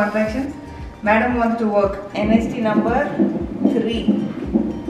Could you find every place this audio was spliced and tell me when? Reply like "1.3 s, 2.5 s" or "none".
2.1 s